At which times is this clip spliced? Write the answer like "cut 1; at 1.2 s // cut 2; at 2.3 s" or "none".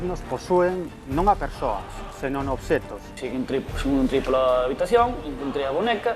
cut 1; at 3.2 s